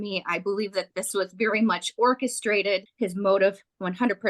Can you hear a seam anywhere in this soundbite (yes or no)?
yes